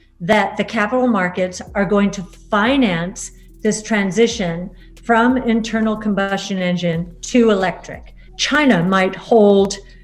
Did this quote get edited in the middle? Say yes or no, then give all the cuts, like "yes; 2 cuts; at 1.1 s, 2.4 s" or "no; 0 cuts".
no; 0 cuts